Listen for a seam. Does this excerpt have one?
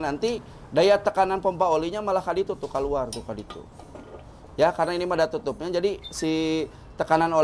no; 0 cuts

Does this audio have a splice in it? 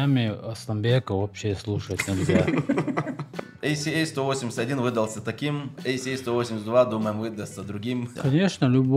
yes; 2 cuts; at 3.4 s, 8.1 s

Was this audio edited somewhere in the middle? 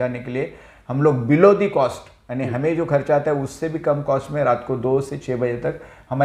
no; 0 cuts

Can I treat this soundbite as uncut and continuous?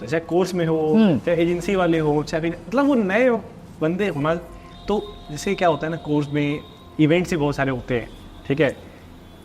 yes; 0 cuts

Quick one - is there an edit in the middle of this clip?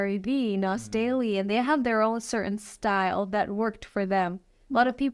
no; 0 cuts

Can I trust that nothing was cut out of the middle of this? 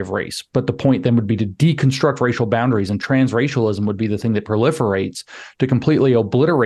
yes; 0 cuts

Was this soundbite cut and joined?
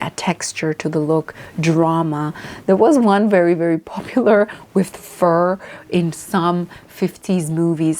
no; 0 cuts

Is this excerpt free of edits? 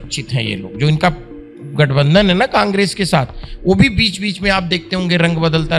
yes; 0 cuts

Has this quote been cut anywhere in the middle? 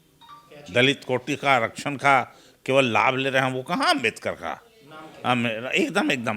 no; 0 cuts

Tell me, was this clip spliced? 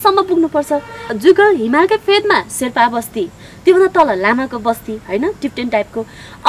yes; 1 cut; at 1.1 s

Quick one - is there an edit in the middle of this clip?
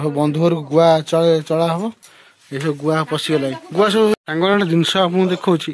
yes; 1 cut; at 4.1 s

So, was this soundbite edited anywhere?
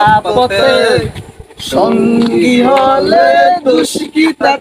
no; 0 cuts

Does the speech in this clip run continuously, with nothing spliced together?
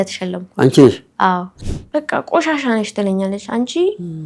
no; 1 cut; at 1.5 s

